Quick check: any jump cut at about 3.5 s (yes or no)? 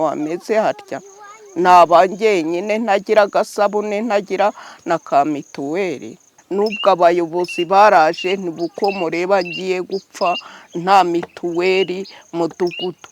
no